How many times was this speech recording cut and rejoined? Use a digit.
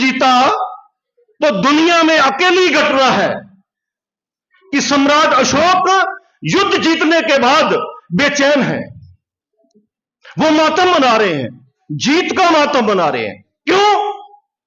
0